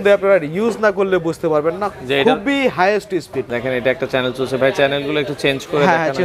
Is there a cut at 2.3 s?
no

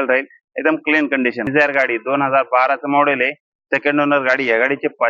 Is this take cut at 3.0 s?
no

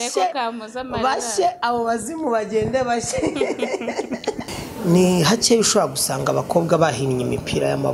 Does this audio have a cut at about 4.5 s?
yes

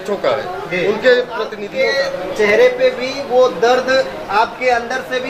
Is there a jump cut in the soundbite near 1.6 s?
yes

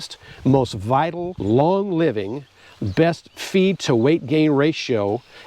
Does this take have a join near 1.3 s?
yes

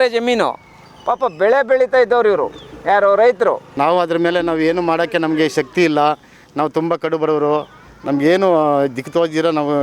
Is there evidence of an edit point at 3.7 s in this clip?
yes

